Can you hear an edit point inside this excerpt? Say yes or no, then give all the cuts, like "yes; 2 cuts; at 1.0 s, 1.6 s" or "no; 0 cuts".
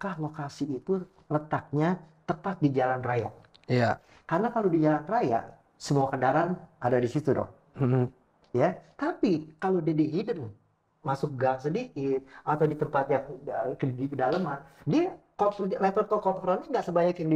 no; 0 cuts